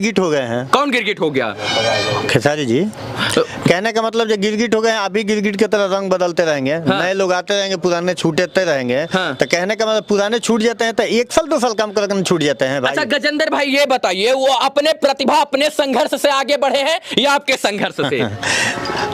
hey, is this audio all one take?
yes; 0 cuts

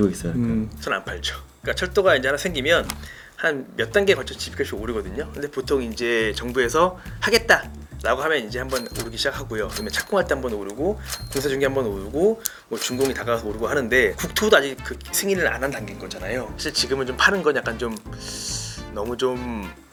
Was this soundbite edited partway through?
no; 0 cuts

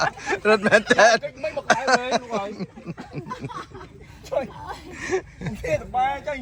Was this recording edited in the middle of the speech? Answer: no; 0 cuts

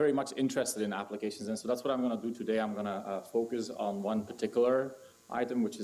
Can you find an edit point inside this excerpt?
yes; 1 cut; at 2.8 s

